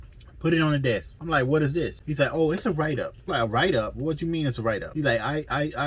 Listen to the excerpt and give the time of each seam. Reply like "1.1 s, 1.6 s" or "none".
1.1 s, 2.0 s, 3.2 s, 4.9 s